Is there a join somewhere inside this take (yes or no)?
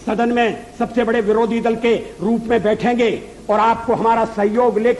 no